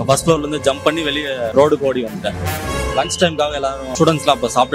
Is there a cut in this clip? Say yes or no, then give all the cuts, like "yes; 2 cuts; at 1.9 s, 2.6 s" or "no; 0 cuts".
yes; 3 cuts; at 1.5 s, 2.6 s, 3.8 s